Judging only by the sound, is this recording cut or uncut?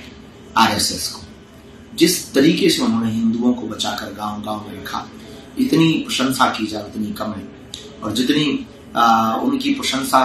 uncut